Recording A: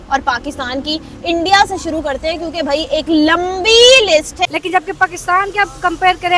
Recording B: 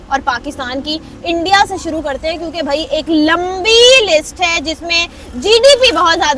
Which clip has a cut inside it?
A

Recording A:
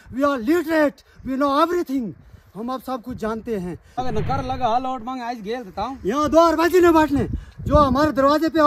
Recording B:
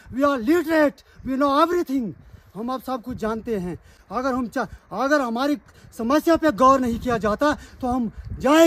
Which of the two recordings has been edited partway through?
A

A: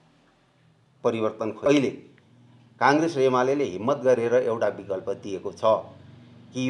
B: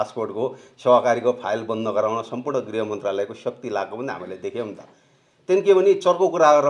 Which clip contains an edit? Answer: A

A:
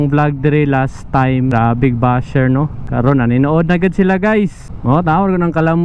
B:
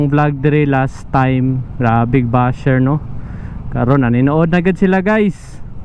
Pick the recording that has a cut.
A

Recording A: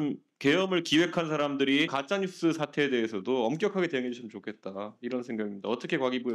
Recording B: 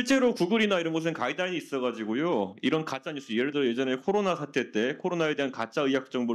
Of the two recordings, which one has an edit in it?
A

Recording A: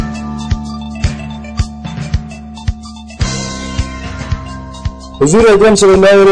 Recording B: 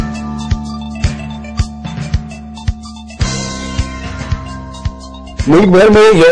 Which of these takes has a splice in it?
A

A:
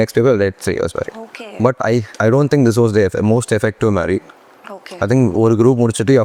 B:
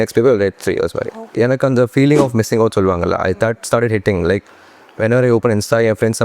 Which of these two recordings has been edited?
B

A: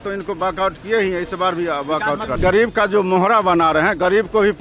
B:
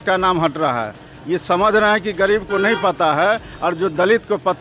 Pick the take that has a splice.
A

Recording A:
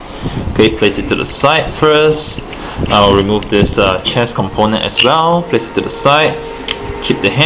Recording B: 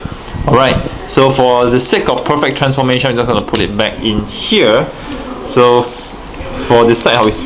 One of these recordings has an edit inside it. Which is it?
A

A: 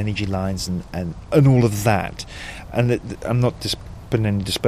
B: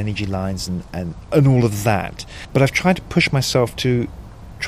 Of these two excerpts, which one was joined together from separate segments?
B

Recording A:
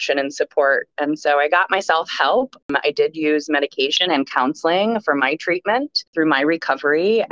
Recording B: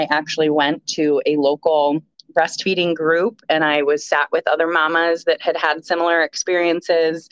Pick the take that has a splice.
A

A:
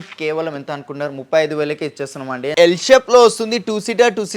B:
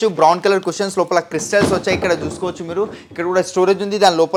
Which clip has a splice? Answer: A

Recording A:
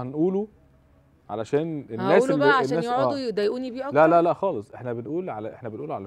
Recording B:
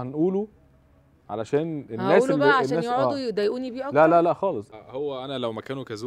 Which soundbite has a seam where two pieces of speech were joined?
B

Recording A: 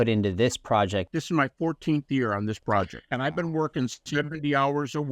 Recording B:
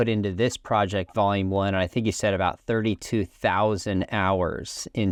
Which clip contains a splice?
A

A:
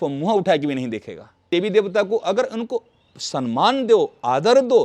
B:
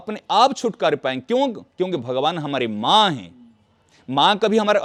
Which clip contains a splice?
A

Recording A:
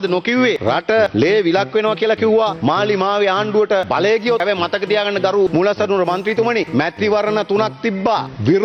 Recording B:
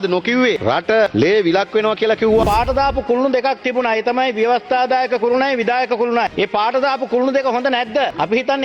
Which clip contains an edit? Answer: B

